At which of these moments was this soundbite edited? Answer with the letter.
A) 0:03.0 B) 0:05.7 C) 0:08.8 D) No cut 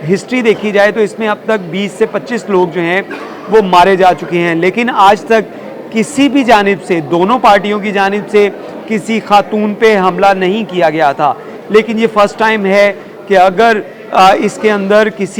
D